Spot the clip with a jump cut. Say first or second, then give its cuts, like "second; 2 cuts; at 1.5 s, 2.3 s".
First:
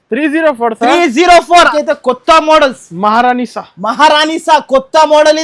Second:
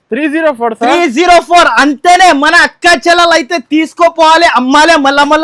first; 1 cut; at 1.7 s